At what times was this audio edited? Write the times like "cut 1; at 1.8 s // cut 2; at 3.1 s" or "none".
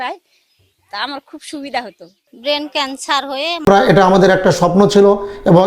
cut 1; at 3.7 s